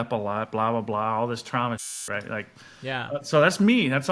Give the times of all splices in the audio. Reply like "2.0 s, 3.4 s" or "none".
none